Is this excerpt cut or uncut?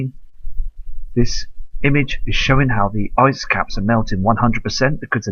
cut